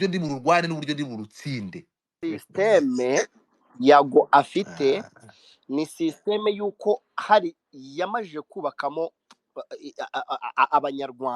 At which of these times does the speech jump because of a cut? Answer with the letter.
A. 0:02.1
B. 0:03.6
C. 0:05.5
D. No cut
A